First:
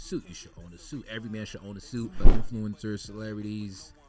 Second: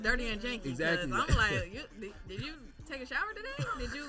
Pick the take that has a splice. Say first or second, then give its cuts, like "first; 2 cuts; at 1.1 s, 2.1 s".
first; 1 cut; at 2.3 s